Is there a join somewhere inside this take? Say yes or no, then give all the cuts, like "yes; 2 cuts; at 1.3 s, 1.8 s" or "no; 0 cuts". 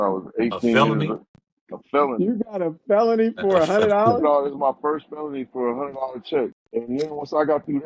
yes; 1 cut; at 6.6 s